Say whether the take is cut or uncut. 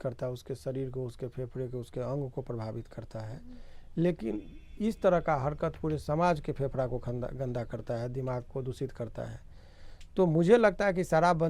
uncut